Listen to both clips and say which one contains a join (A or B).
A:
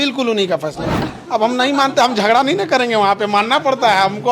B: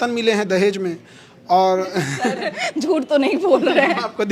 A